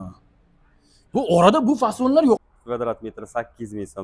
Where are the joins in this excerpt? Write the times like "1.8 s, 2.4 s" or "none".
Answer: 2.4 s

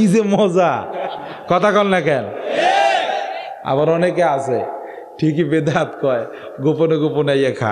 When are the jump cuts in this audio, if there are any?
none

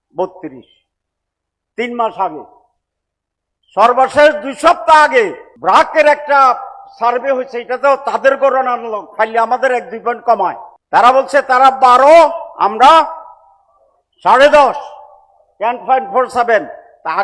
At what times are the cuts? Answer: 5.5 s, 10.7 s

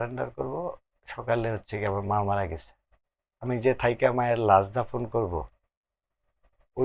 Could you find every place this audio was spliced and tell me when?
none

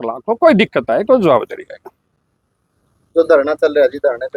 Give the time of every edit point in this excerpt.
none

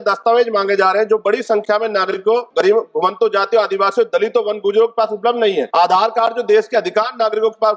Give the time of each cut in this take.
2.5 s, 5.7 s

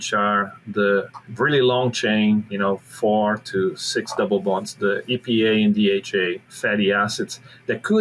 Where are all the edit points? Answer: 1.2 s, 2.5 s, 6.5 s

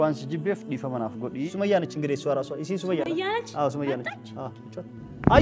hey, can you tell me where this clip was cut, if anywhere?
1.5 s

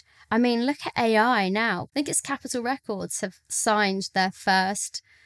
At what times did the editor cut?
1.9 s

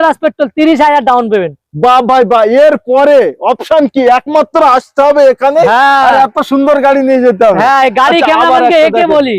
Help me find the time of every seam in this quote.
none

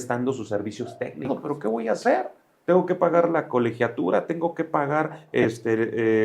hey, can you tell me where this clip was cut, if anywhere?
1.2 s

